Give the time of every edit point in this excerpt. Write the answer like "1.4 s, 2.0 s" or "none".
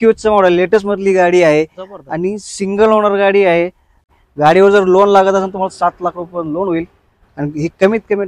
4.1 s